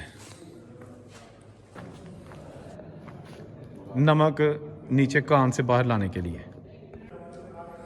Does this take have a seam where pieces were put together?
yes; 1 cut; at 1.8 s

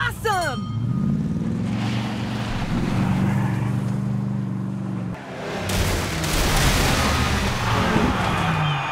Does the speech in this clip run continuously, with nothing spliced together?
no; 1 cut; at 5.1 s

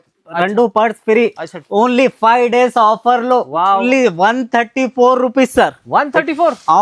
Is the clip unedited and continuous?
no; 1 cut; at 3.8 s

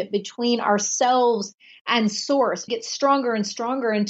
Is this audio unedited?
no; 1 cut; at 2.6 s

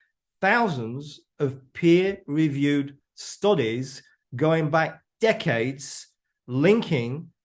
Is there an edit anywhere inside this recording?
no; 0 cuts

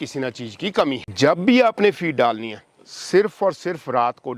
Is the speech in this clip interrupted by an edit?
yes; 1 cut; at 1.1 s

